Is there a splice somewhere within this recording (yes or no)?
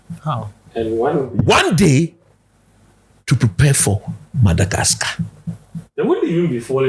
no